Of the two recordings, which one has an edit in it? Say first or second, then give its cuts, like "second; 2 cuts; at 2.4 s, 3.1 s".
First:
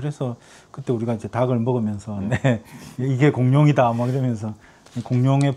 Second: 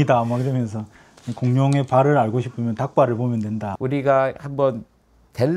second; 1 cut; at 3.7 s